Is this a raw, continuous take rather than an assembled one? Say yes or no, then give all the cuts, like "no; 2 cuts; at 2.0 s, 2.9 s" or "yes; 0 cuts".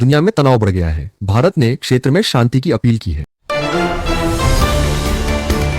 no; 1 cut; at 3.3 s